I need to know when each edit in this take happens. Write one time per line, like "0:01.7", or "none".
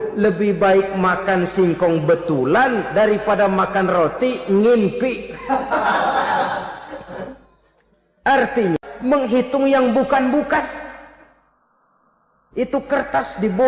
0:08.8

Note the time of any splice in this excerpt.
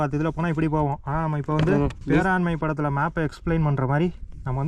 0:02.0

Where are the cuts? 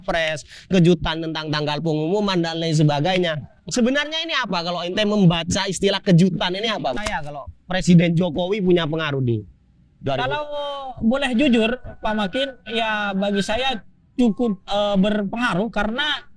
0:07.1

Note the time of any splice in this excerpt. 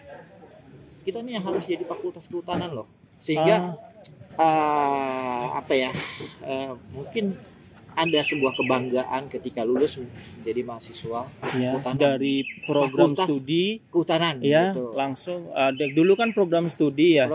none

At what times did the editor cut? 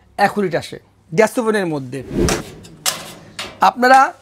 0:02.4

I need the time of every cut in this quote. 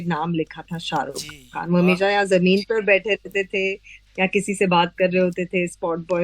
none

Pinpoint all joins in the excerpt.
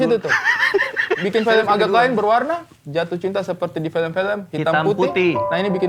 none

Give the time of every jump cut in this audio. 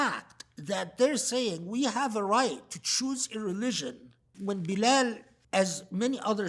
0:04.3
0:05.3

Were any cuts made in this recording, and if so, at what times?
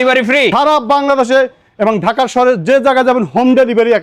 none

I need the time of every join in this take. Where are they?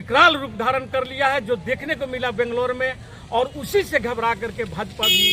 none

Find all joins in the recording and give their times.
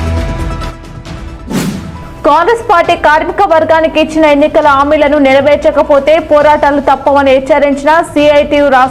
0:01.9

